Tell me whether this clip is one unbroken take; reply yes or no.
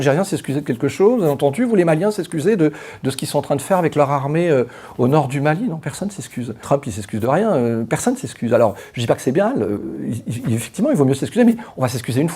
yes